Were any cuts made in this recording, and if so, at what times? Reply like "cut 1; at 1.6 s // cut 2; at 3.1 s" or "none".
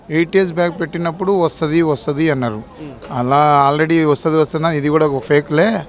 none